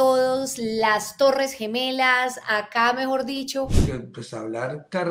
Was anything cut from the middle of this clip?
yes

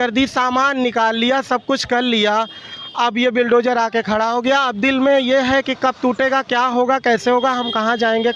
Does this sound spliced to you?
no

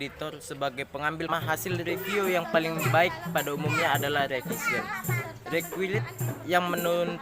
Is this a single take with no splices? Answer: no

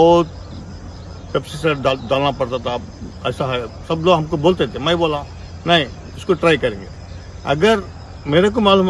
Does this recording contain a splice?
no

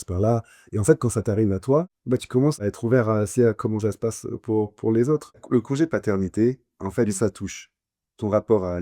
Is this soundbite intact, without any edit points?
no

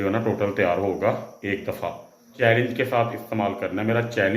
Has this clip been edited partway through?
yes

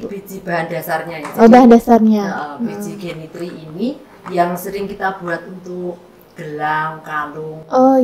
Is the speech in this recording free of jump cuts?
yes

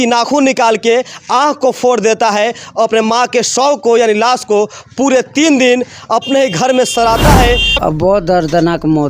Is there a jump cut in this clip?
yes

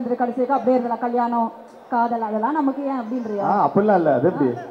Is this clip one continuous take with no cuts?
yes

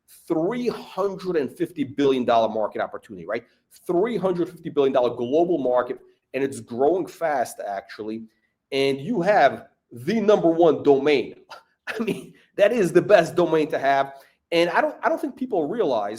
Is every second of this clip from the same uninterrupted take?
yes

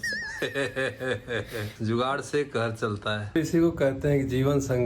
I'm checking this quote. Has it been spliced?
yes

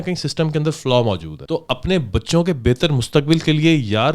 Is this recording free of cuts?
no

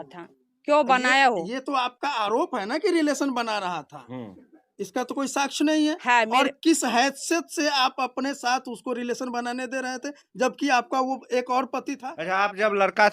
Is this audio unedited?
no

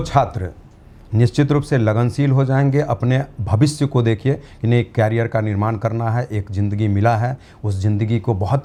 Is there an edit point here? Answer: no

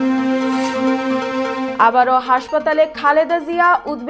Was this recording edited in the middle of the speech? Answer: yes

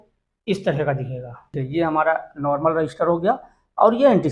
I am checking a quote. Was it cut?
yes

